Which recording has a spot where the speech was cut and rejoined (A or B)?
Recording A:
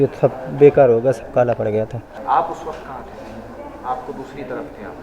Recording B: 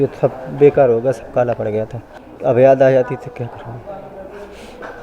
B